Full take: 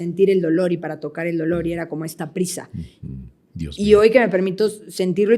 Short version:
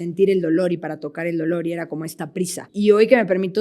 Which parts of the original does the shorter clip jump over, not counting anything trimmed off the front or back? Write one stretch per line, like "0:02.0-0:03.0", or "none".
0:02.6-0:03.6